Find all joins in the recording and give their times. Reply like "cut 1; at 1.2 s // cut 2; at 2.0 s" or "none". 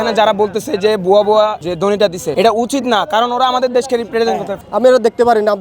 cut 1; at 1.8 s // cut 2; at 4.5 s